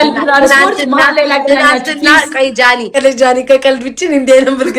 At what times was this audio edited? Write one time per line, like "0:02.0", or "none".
0:03.0